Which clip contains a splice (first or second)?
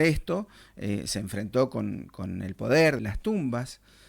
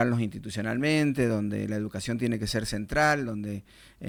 first